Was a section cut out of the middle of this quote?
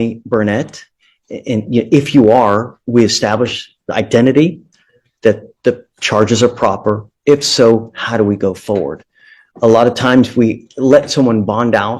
no; 0 cuts

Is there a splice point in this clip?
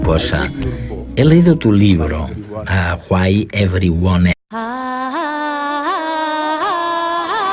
no; 0 cuts

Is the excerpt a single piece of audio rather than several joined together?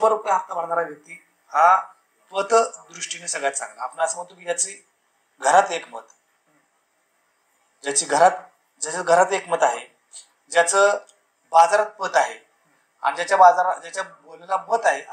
yes; 0 cuts

